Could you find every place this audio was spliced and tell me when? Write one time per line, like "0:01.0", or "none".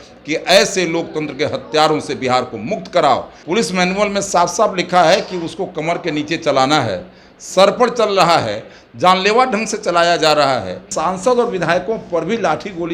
0:03.3
0:10.9